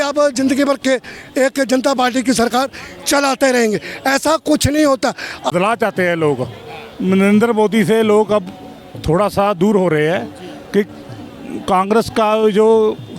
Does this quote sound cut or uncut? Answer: cut